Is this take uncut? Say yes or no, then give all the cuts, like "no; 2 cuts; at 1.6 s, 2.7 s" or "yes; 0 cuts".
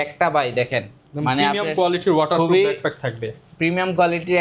yes; 0 cuts